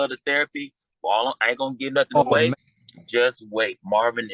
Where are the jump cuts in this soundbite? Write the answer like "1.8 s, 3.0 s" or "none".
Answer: 2.5 s